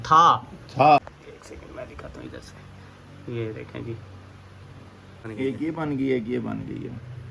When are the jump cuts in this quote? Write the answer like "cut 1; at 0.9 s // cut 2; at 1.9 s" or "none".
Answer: cut 1; at 1.0 s // cut 2; at 5.3 s